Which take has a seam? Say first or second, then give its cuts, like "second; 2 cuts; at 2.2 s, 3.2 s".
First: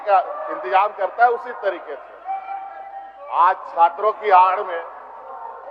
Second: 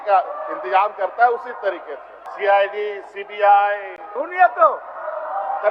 second; 1 cut; at 2.2 s